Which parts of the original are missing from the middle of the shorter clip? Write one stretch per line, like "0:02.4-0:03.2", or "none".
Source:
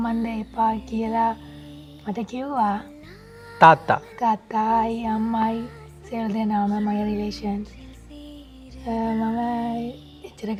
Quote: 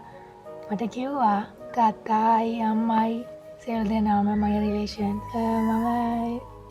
0:03.0-0:04.1
0:07.7-0:08.8

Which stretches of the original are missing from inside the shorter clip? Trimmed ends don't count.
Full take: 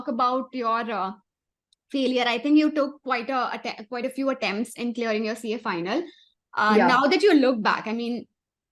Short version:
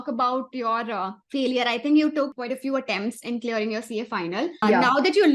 0:01.2-0:01.8
0:03.0-0:03.9
0:06.1-0:06.7

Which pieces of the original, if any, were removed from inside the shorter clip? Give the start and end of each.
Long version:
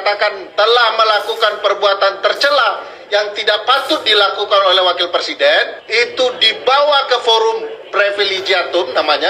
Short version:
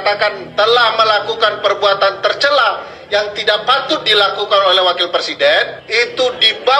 none

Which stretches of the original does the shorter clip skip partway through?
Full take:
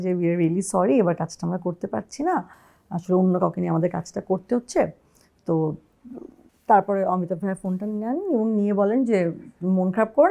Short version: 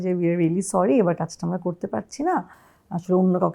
none

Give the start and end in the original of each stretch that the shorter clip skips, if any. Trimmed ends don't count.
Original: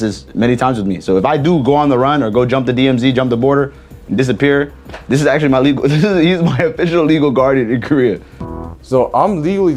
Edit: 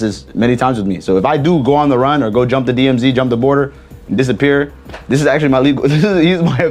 none

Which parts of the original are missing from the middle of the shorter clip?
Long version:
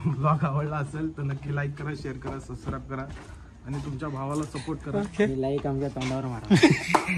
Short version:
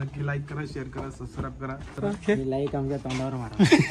0:03.2-0:04.8

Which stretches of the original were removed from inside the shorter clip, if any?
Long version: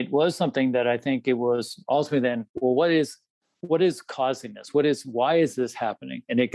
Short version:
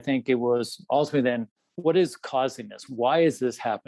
0:02.5-0:03.3
0:04.7-0:05.0

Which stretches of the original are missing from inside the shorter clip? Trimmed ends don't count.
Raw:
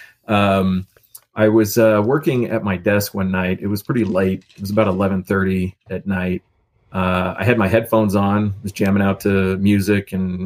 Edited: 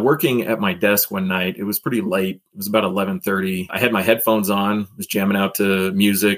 0:05.7-0:07.4

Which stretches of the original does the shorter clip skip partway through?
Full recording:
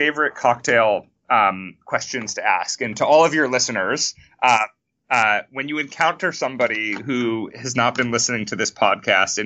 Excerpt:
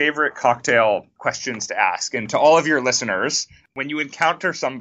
0:01.1-0:01.8
0:04.3-0:05.5

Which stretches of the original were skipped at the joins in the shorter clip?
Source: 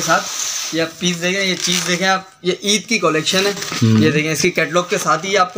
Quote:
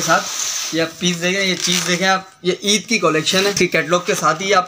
0:03.5-0:04.4

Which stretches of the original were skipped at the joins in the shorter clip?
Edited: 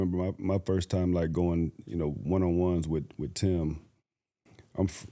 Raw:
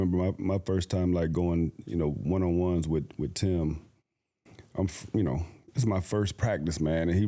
none

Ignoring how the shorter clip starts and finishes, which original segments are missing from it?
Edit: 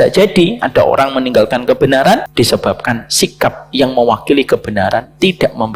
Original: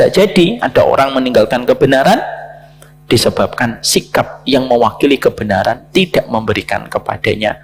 0:02.3-0:03.0

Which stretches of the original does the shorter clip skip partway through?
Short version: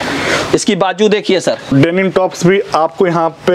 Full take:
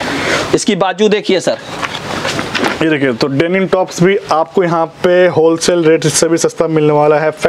0:01.7-0:03.3

